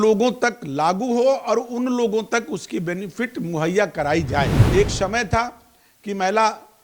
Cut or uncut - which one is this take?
cut